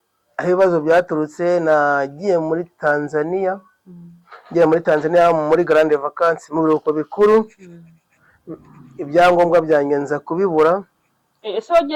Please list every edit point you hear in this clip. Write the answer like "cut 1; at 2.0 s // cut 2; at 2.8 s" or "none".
none